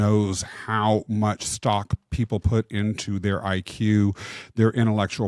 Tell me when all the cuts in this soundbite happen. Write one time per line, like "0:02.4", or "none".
none